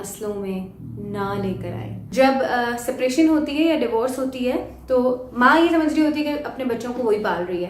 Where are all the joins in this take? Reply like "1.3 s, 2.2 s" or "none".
2.0 s

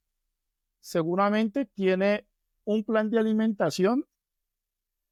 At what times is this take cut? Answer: none

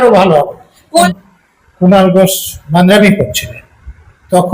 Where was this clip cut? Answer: 1.3 s

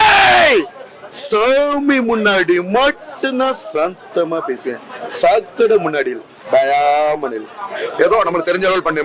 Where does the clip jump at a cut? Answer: none

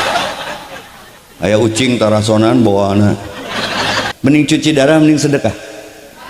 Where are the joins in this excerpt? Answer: 4.0 s

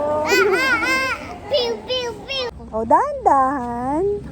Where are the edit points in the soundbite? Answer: 2.6 s

